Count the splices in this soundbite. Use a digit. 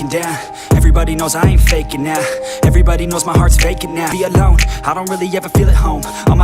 1